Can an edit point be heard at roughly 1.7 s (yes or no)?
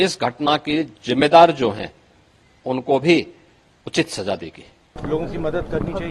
no